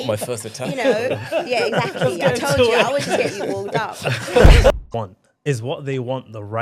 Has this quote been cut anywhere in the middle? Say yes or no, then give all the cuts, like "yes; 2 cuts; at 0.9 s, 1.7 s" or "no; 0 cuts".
yes; 1 cut; at 4.7 s